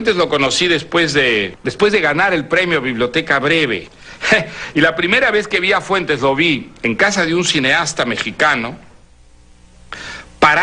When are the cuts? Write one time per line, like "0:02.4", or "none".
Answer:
none